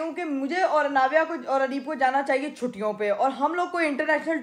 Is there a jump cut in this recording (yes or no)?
no